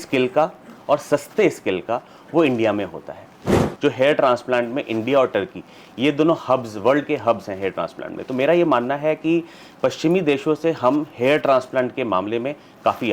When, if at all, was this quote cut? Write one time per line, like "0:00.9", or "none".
0:03.7